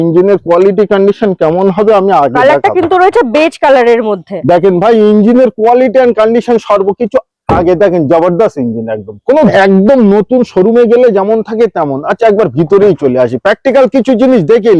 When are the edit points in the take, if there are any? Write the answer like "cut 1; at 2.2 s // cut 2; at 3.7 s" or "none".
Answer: cut 1; at 9.5 s